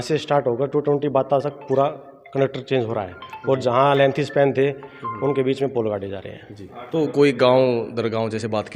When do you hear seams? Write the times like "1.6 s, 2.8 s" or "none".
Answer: none